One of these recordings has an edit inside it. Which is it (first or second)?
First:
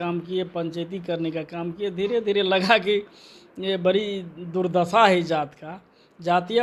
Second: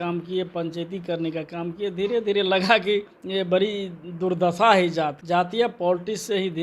second